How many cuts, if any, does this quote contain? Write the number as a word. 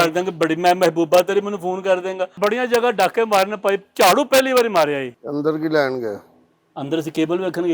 two